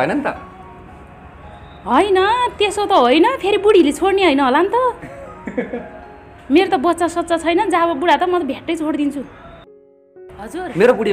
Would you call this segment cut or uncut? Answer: cut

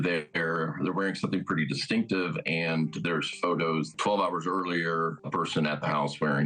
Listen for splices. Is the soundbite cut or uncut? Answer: cut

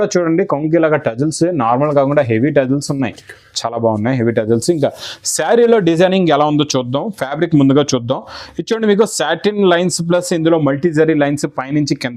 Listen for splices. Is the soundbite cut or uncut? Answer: uncut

